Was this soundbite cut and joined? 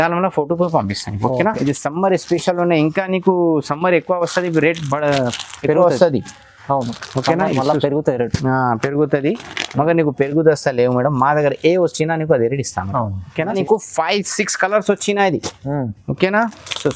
yes; 2 cuts; at 1.6 s, 13.6 s

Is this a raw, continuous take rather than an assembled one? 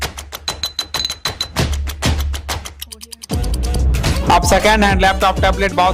yes; 0 cuts

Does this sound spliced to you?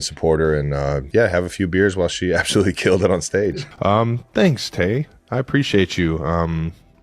yes; 2 cuts; at 1.0 s, 3.6 s

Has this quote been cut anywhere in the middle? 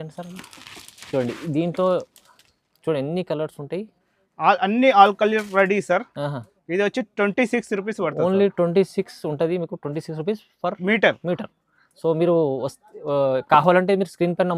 no; 0 cuts

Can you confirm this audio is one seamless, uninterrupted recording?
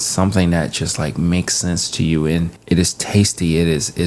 no; 1 cut; at 2.5 s

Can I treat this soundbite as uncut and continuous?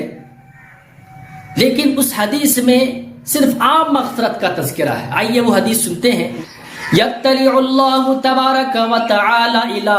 no; 1 cut; at 6.3 s

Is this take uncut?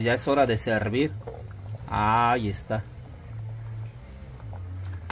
yes; 0 cuts

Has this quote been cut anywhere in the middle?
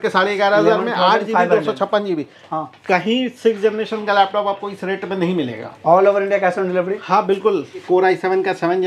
yes; 1 cut; at 7.8 s

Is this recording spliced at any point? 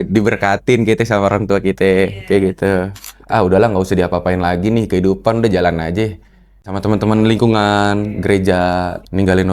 yes; 2 cuts; at 3.1 s, 6.6 s

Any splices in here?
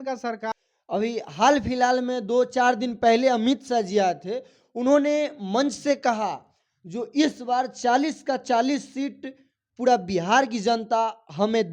no; 0 cuts

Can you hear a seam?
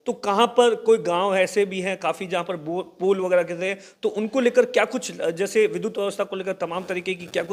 no; 0 cuts

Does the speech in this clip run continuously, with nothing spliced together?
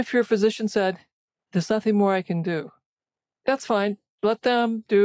yes; 0 cuts

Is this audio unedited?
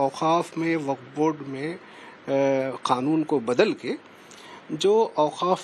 yes; 0 cuts

